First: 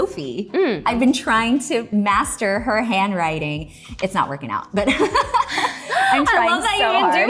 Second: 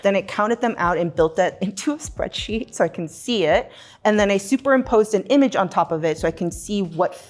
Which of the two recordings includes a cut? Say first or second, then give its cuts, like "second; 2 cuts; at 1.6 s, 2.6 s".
first; 2 cuts; at 0.8 s, 1.9 s